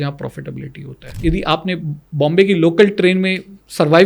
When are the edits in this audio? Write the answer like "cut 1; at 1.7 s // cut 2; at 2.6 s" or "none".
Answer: cut 1; at 1.1 s